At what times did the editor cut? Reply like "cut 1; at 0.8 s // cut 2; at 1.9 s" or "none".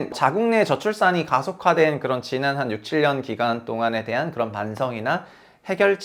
none